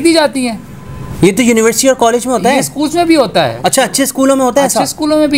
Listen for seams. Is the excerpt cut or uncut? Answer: uncut